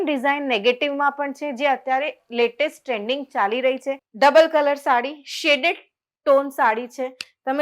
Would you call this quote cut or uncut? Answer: cut